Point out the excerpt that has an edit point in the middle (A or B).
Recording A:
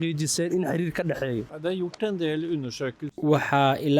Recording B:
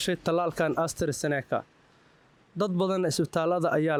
A